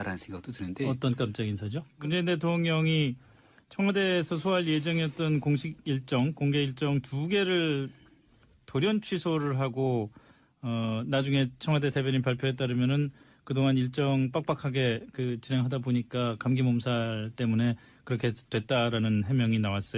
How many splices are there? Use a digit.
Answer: 1